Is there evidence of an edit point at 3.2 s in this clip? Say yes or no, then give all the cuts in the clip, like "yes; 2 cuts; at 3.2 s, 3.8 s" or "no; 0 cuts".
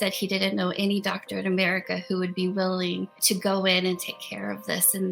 yes; 1 cut; at 3.2 s